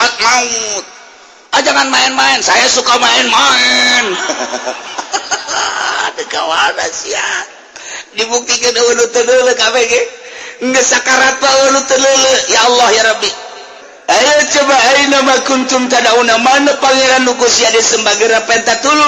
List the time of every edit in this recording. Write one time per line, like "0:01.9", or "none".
0:13.9